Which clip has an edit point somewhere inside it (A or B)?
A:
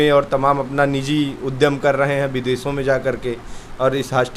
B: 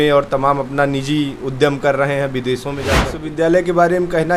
B